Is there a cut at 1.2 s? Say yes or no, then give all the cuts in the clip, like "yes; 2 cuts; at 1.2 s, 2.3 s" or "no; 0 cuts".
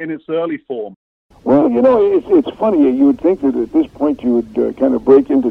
yes; 1 cut; at 1.2 s